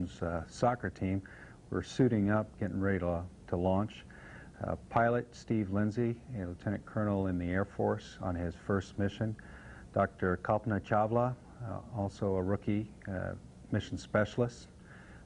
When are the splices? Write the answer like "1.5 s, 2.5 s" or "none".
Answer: 13.3 s